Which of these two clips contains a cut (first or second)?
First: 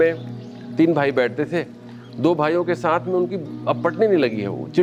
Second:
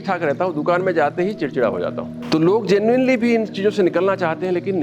second